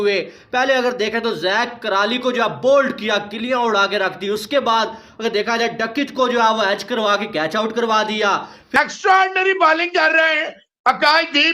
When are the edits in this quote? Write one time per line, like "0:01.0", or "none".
0:08.8